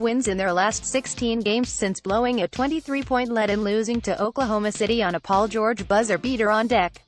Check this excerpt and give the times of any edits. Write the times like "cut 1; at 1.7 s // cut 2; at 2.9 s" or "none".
none

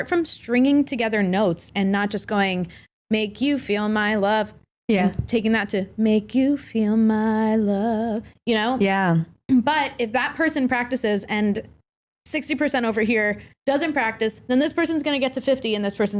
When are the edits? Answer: cut 1; at 2.9 s

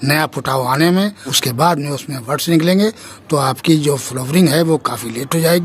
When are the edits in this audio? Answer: cut 1; at 1.3 s

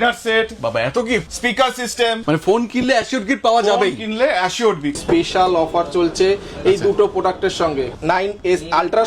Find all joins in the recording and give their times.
cut 1; at 1.3 s // cut 2; at 2.2 s // cut 3; at 5.0 s // cut 4; at 7.9 s

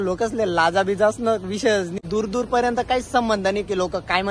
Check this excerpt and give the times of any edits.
cut 1; at 2.0 s

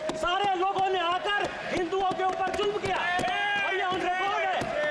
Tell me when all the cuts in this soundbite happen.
none

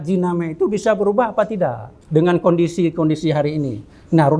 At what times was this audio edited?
none

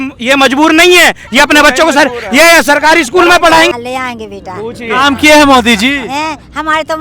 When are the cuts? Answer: cut 1; at 3.7 s

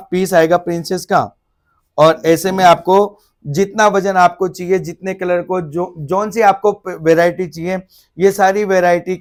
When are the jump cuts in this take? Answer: none

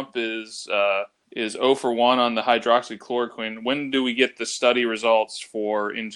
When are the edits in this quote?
cut 1; at 1.2 s

